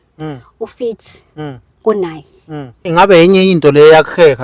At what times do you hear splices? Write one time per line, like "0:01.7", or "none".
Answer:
0:02.9

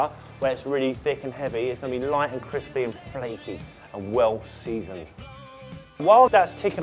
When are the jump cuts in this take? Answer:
0:04.6

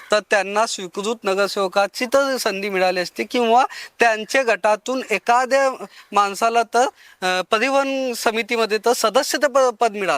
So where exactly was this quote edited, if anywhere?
none

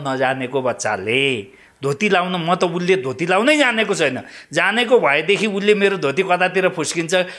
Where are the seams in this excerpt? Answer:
none

